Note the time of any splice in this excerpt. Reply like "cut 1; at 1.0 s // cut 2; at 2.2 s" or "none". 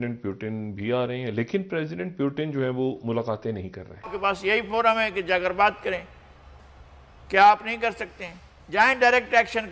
cut 1; at 4.1 s